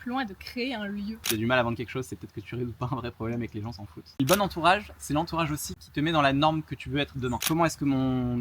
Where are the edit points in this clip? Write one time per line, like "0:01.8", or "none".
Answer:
0:01.2
0:04.2
0:05.8
0:07.4